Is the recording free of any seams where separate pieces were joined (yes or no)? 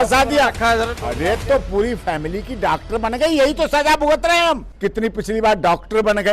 no